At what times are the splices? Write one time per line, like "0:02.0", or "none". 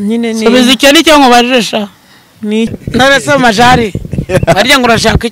0:02.7